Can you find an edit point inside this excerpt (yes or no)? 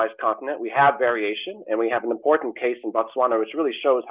no